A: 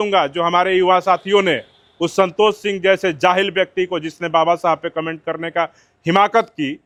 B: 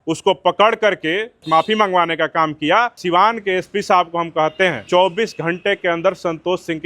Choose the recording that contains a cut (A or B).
B